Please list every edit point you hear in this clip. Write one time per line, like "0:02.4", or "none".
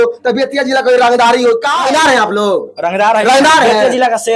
0:01.6